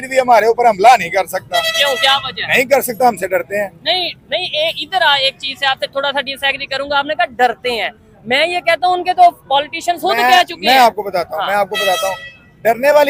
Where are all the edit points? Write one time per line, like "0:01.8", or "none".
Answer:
none